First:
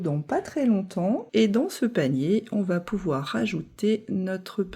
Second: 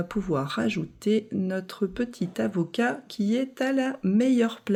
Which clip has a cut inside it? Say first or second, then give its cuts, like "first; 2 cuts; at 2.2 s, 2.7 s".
first; 1 cut; at 1.2 s